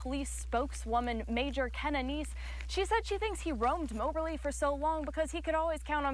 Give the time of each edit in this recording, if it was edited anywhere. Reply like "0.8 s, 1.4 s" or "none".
none